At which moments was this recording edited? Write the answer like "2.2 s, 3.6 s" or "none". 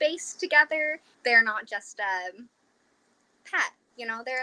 1.1 s